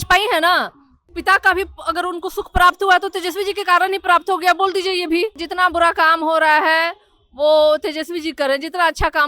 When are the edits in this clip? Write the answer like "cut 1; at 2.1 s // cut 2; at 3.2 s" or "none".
cut 1; at 1.1 s // cut 2; at 5.4 s